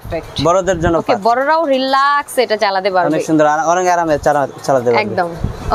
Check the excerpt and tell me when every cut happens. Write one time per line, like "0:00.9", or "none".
none